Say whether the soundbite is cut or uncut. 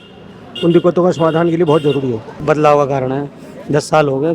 cut